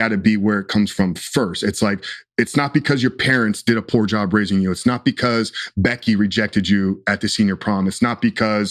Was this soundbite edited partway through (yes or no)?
no